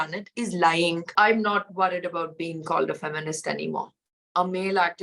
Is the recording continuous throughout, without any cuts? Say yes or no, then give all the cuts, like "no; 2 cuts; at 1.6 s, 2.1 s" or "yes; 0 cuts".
no; 2 cuts; at 1.1 s, 4.3 s